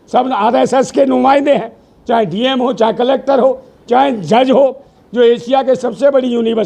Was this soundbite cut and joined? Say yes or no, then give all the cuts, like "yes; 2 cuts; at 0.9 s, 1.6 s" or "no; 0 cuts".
yes; 1 cut; at 4.9 s